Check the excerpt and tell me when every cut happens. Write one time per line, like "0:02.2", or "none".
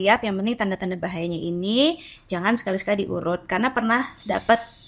none